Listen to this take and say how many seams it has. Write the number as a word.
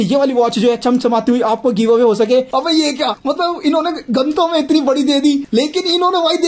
one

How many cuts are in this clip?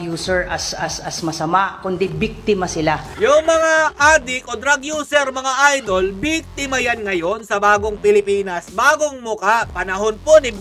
two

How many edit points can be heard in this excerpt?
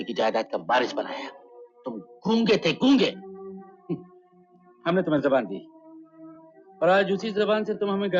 zero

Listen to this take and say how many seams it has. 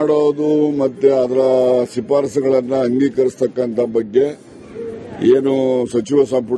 one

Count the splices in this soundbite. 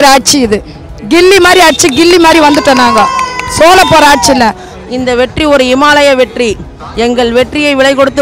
one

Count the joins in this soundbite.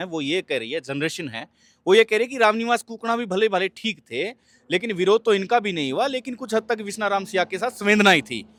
zero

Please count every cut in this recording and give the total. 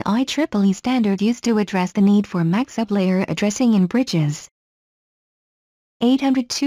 one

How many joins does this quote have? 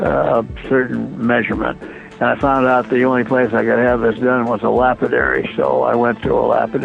one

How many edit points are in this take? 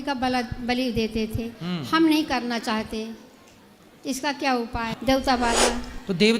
one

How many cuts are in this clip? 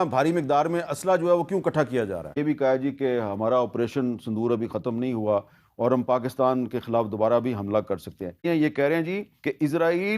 two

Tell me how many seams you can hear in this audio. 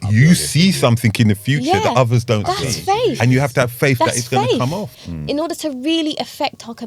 one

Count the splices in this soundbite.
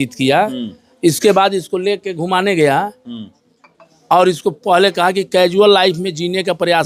zero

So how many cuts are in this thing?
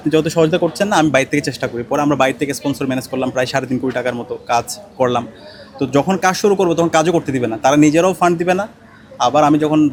zero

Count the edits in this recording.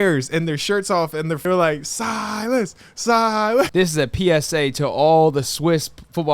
two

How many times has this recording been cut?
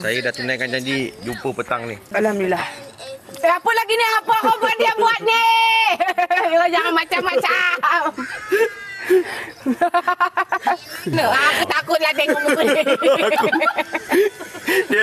two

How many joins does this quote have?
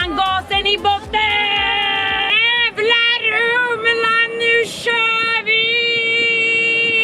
one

